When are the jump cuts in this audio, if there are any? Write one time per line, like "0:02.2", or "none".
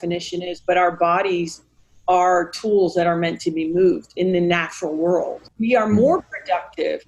0:05.4